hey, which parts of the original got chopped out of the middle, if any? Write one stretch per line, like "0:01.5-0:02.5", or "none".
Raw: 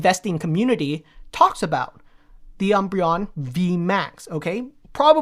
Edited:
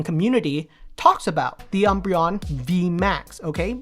0:01.9-0:02.5

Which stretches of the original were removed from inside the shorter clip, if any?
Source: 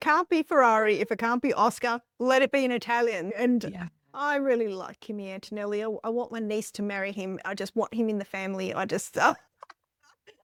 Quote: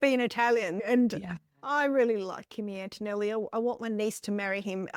none

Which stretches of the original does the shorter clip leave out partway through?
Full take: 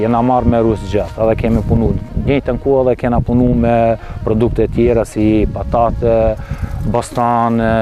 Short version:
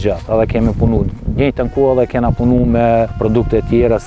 0:04.0-0:04.2

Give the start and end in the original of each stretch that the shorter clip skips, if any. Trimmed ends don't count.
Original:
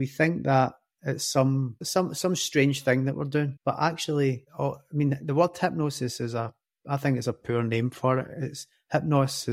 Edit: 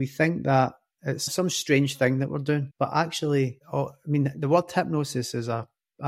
0:01.3-0:02.1

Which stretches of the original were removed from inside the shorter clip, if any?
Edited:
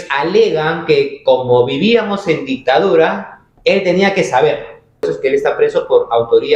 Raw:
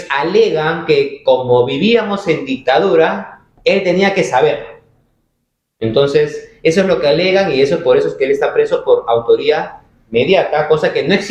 0:05.1-0:08.0

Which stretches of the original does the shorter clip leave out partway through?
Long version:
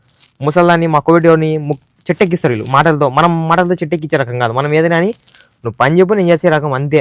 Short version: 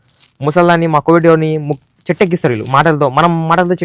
none

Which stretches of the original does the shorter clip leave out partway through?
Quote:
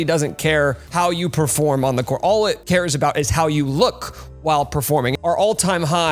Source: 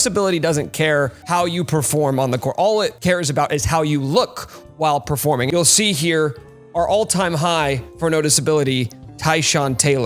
0:05.5-0:06.6

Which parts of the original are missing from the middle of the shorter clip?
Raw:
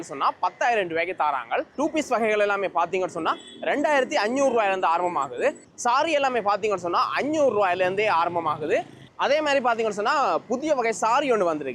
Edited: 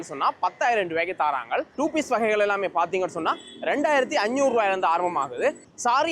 none

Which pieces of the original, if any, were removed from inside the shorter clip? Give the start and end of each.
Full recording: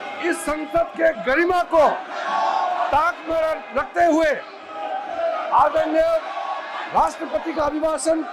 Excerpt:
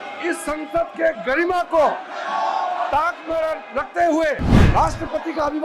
0:04.5-0:06.7

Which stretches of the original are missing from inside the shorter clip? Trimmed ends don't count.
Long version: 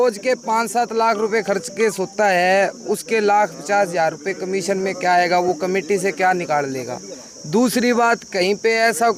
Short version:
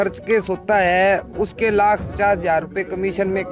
none

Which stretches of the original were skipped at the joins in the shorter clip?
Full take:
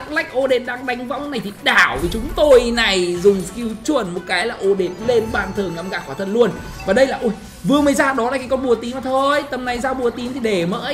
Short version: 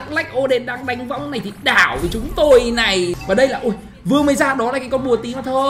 0:03.2-0:06.7

